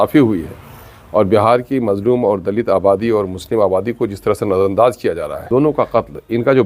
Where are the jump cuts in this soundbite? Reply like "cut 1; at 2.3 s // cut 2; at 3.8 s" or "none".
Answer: cut 1; at 5.5 s